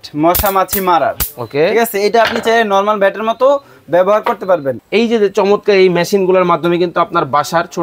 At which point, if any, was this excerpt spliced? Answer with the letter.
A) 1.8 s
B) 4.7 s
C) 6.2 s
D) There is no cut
B